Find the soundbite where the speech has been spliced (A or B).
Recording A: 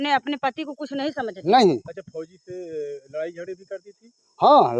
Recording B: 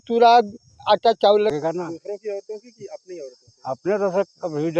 B